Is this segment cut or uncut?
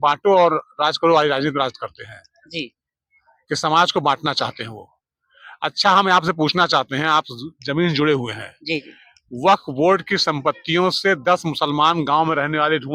uncut